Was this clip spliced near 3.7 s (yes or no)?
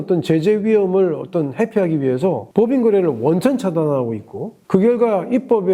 no